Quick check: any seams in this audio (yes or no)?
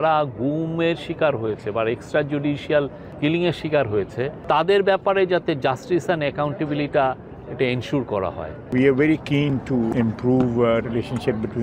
yes